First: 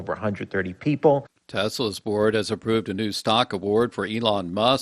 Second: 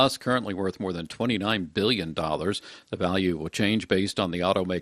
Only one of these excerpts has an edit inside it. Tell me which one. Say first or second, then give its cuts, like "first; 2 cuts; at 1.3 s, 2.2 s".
first; 1 cut; at 1.4 s